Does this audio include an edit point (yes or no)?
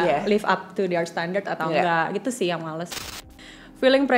yes